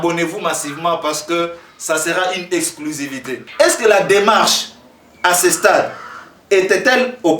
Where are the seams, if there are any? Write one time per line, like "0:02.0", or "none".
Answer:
0:03.4